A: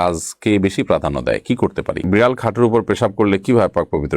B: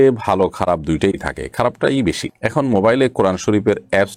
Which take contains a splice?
A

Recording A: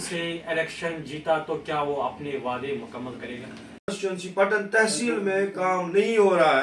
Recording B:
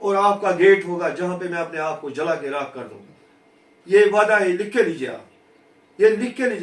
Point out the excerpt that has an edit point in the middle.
A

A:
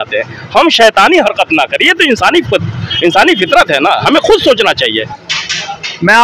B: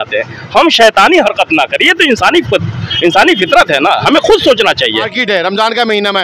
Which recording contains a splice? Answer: B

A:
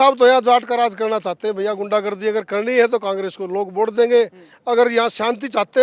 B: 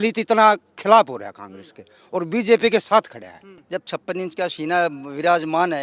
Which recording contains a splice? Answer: B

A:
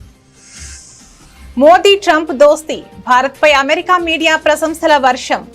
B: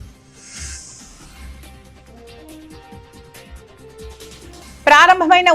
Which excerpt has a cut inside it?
A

